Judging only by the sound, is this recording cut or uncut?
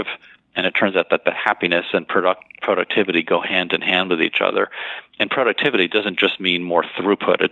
uncut